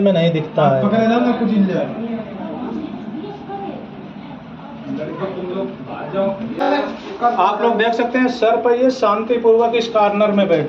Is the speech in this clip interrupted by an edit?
yes; 1 cut; at 6.6 s

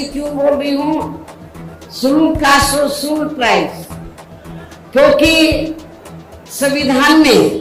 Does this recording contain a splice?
no; 0 cuts

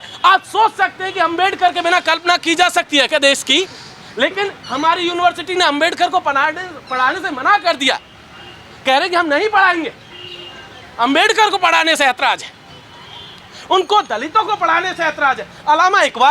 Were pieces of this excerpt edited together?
no; 0 cuts

